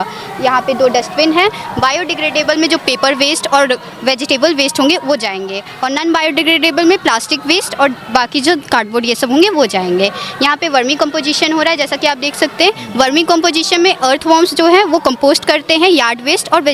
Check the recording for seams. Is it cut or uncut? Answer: uncut